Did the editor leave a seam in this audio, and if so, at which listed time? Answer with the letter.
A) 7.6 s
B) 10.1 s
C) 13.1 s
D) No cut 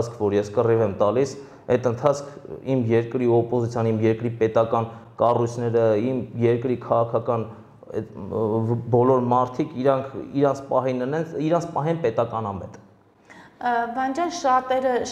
D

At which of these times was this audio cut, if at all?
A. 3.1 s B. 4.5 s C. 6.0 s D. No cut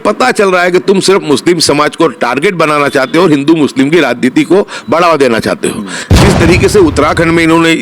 C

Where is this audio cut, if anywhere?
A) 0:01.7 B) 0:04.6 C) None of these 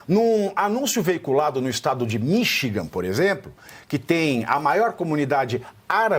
C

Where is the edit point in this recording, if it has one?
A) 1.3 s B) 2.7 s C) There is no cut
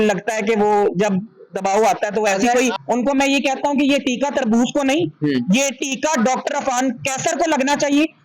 B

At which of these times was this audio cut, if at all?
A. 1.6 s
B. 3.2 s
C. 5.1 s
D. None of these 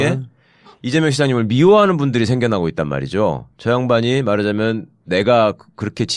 B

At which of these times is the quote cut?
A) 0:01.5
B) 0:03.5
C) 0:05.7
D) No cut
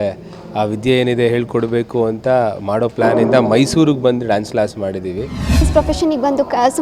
C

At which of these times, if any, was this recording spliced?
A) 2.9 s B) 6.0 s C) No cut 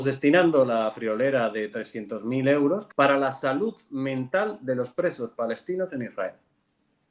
A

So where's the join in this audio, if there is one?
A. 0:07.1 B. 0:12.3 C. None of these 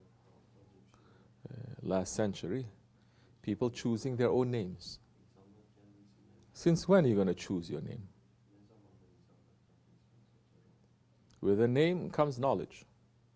B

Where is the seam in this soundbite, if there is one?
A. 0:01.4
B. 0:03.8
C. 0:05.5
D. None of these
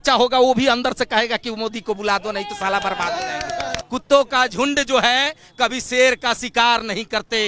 B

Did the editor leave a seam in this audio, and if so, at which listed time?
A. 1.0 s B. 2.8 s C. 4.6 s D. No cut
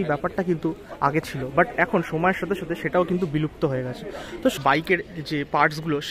C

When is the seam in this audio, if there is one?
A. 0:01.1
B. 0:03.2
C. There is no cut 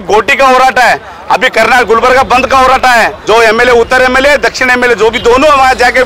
B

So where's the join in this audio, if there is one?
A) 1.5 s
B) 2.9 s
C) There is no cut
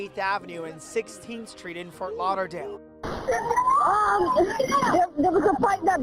B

